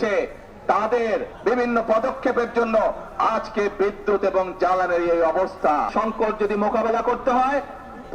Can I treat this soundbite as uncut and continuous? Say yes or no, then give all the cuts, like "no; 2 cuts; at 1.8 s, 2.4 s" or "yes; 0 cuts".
no; 2 cuts; at 1.3 s, 5.9 s